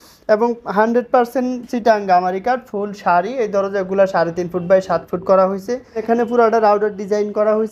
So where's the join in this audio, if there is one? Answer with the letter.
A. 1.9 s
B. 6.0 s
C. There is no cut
B